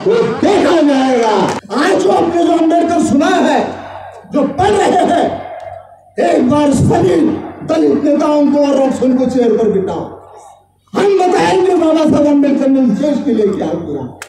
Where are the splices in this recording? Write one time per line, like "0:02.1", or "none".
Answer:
0:01.6